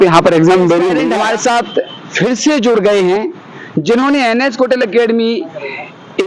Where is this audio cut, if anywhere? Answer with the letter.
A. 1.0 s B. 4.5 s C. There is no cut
A